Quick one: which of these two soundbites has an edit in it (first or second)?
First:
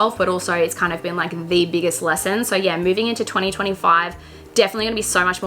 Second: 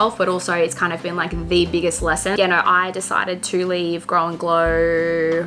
second